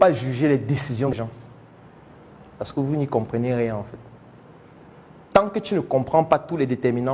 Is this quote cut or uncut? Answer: cut